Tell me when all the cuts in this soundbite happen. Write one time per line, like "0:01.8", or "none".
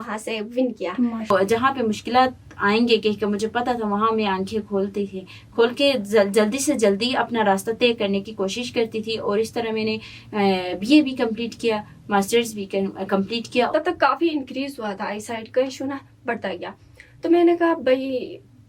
0:01.3
0:13.7